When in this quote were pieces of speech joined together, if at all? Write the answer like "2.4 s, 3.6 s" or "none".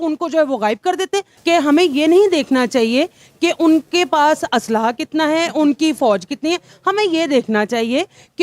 1.3 s